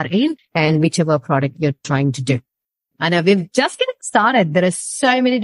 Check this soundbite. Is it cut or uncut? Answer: cut